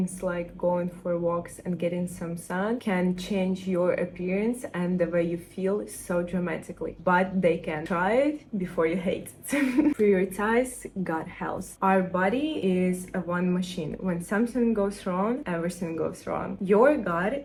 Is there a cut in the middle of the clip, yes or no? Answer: no